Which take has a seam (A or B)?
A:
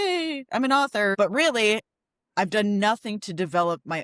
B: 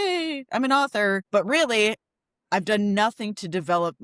A